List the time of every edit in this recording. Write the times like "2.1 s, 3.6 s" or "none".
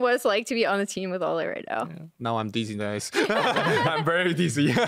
none

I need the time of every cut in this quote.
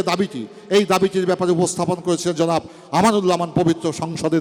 none

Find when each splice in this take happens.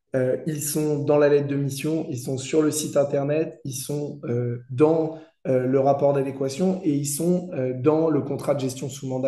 none

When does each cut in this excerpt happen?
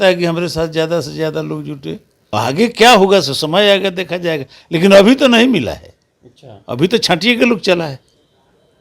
2.1 s

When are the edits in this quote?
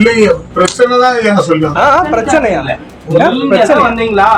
none

